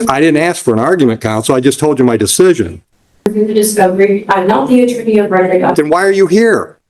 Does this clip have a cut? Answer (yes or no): yes